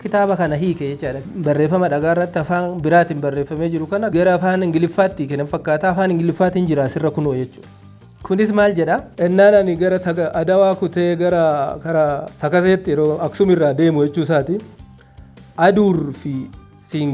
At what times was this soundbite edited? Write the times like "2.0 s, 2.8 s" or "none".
1.2 s, 9.1 s